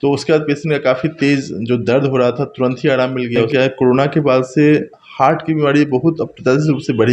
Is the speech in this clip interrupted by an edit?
yes; 1 cut; at 3.5 s

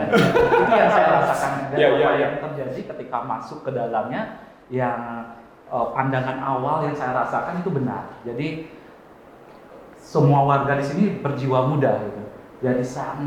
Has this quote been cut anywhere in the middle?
no; 0 cuts

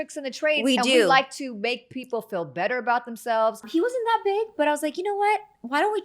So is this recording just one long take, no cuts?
no; 1 cut; at 3.7 s

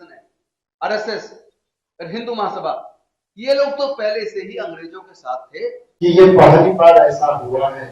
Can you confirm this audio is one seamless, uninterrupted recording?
no; 1 cut; at 5.9 s

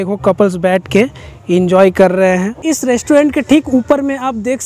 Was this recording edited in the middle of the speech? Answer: yes; 1 cut; at 2.6 s

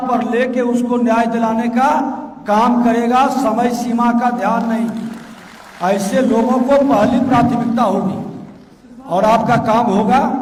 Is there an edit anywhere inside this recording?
no; 0 cuts

